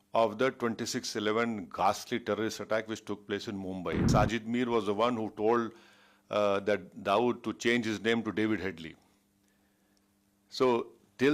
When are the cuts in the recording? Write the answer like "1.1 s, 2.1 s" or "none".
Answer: 4.1 s